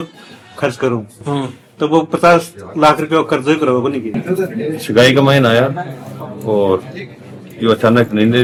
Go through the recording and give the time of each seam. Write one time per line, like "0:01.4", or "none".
none